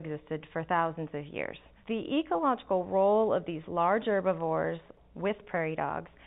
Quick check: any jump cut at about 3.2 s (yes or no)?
no